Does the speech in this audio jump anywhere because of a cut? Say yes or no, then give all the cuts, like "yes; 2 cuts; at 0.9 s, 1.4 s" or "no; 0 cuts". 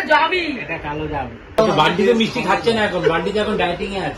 yes; 1 cut; at 1.6 s